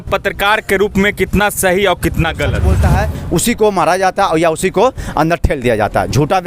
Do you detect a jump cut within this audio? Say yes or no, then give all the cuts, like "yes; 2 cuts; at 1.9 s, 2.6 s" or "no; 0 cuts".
yes; 1 cut; at 2.8 s